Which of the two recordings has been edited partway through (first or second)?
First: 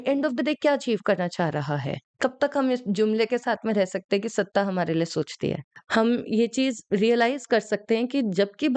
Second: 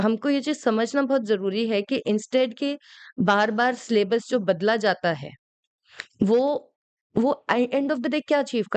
first